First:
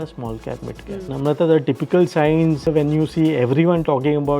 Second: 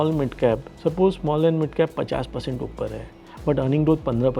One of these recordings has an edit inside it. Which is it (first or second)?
first